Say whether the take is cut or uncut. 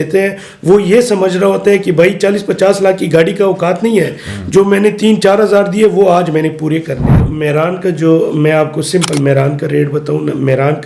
cut